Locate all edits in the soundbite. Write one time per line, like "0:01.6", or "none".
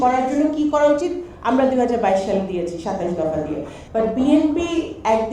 0:03.7